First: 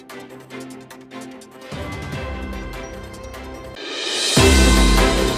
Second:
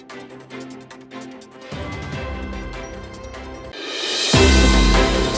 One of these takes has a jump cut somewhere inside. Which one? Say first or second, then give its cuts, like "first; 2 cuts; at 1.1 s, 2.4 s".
second; 1 cut; at 3.7 s